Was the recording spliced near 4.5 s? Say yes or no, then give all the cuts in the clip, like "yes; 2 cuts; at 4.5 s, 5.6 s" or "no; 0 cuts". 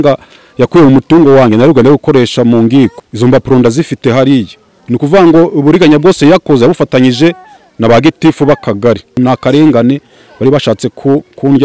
no; 2 cuts; at 3.0 s, 9.2 s